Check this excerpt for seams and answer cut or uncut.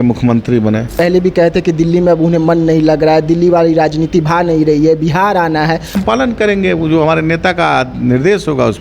cut